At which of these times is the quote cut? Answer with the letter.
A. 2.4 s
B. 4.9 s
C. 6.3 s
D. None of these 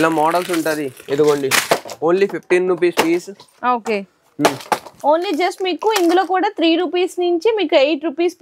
B